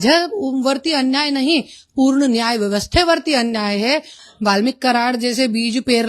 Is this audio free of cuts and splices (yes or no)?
no